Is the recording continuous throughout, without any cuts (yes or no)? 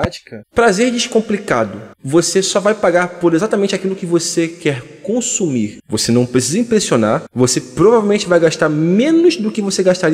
yes